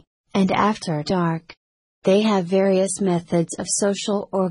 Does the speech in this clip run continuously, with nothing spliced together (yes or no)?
no